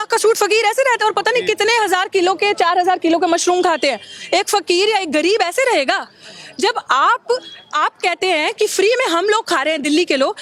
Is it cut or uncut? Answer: uncut